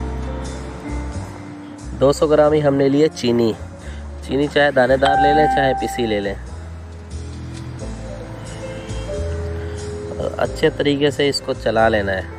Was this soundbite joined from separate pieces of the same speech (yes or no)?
yes